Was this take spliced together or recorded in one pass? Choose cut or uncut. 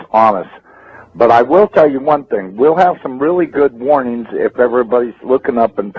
uncut